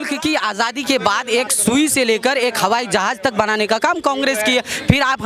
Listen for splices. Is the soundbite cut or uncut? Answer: uncut